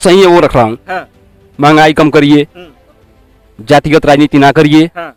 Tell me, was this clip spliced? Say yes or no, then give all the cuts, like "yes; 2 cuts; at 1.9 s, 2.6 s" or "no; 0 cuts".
no; 0 cuts